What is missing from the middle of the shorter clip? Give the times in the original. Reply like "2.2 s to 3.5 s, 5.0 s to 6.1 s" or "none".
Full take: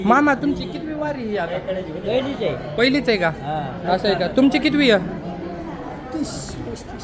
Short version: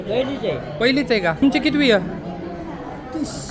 3.4 s to 4.4 s